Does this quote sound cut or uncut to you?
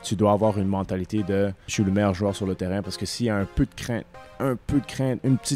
cut